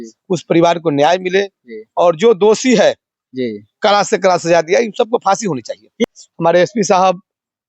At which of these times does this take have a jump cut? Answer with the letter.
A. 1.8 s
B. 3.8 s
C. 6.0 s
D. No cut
C